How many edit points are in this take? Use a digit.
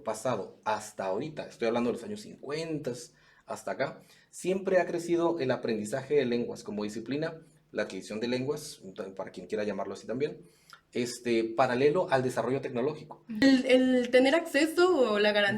1